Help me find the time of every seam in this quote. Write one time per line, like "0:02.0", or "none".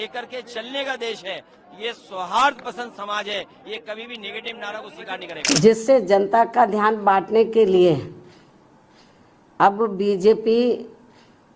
0:05.6